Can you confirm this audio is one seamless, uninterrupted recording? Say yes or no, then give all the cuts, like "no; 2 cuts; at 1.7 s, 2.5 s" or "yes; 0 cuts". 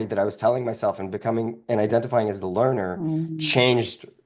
yes; 0 cuts